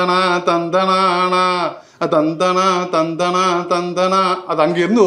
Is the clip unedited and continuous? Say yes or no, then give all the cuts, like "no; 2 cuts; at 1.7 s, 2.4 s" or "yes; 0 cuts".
yes; 0 cuts